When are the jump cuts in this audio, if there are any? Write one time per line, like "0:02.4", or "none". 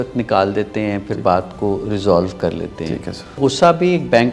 0:03.4